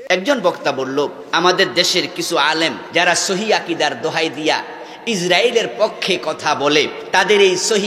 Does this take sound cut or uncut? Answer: cut